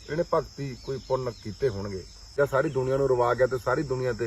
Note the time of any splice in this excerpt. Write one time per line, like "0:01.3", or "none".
0:02.3